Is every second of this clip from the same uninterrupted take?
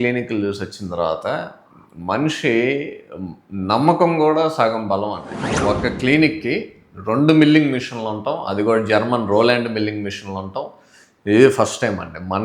no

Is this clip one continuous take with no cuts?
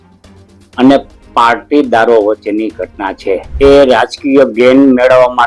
no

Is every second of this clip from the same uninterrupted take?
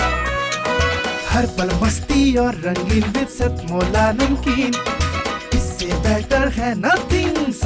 yes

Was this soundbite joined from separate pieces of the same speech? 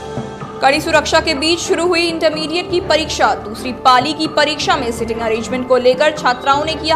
no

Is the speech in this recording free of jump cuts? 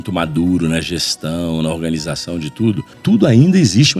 no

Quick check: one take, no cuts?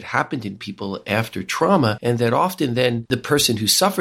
no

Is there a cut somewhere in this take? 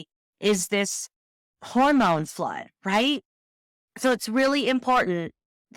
no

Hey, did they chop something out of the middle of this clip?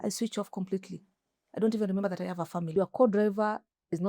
yes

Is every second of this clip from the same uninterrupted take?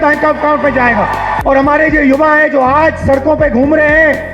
no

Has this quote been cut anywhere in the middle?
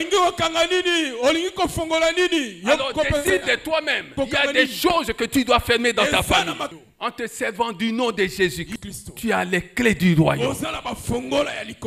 yes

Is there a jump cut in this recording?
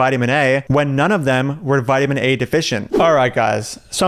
yes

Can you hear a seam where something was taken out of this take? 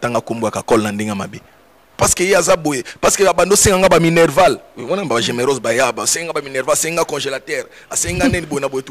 yes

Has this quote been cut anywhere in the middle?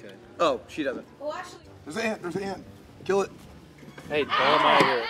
yes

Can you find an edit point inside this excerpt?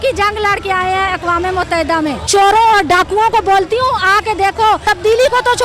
yes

